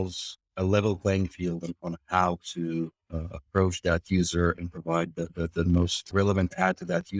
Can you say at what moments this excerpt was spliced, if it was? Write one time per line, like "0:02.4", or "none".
0:06.0